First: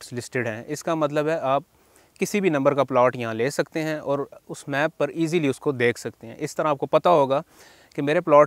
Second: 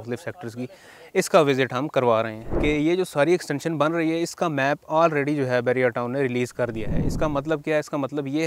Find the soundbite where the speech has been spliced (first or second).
second